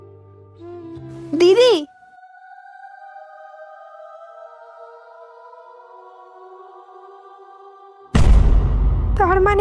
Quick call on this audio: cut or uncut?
cut